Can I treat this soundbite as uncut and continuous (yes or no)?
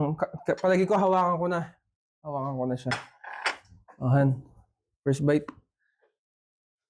yes